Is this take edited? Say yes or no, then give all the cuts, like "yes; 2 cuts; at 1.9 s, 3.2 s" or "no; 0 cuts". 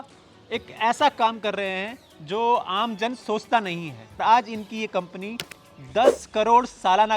yes; 1 cut; at 4.2 s